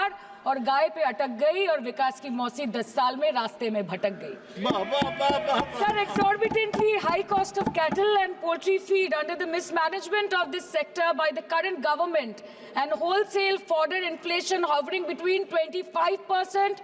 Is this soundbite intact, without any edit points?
yes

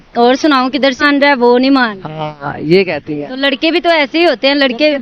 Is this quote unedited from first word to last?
no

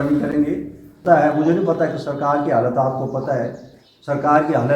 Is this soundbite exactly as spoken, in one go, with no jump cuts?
no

